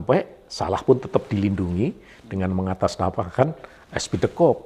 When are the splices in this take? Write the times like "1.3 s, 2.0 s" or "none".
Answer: none